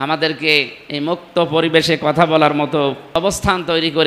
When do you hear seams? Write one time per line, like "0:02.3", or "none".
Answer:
0:03.0